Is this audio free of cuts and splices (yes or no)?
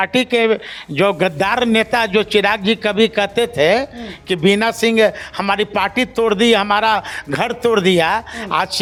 yes